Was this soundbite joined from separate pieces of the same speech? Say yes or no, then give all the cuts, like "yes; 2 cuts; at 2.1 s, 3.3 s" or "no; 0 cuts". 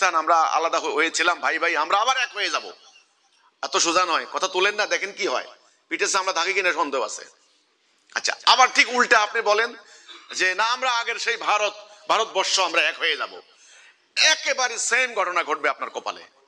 no; 0 cuts